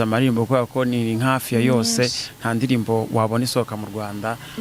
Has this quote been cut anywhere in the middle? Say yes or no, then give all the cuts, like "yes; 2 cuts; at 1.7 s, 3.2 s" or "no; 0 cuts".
no; 0 cuts